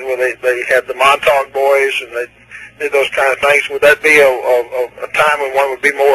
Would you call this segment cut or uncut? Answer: cut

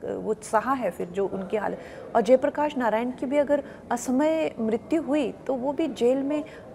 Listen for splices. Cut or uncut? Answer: uncut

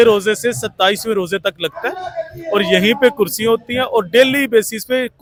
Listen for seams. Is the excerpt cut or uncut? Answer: uncut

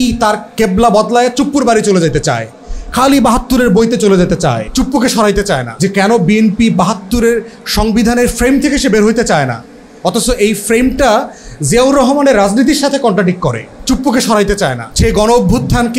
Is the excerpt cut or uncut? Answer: cut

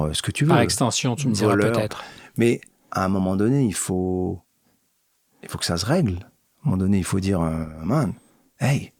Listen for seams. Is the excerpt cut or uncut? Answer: uncut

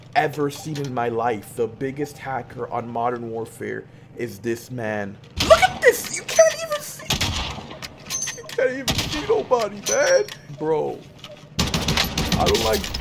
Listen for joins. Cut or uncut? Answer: cut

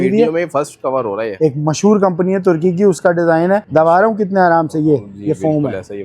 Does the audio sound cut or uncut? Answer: cut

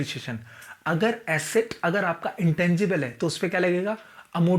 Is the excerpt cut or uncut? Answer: uncut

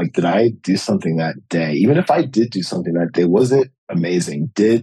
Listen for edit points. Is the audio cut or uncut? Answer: uncut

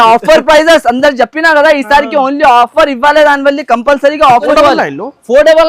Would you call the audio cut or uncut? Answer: cut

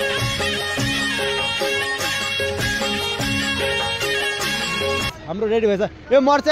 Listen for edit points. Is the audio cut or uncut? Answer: cut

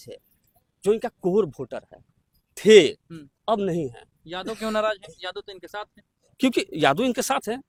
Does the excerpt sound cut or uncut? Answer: uncut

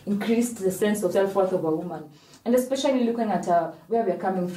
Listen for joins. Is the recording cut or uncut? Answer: cut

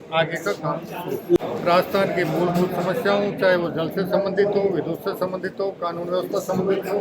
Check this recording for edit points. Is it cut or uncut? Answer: cut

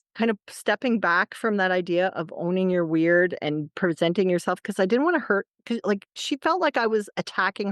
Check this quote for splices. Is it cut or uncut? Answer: cut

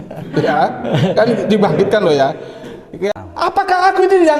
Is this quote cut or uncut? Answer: cut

